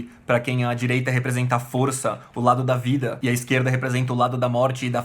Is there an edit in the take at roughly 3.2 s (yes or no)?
yes